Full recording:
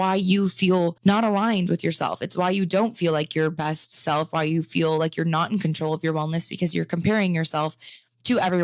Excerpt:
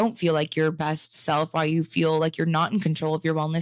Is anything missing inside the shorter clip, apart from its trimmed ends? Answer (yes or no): no